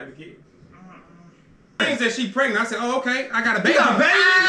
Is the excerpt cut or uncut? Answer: cut